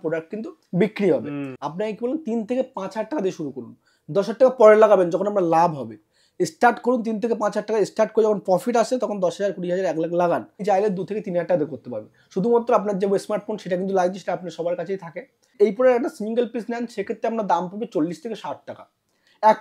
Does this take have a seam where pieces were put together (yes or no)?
yes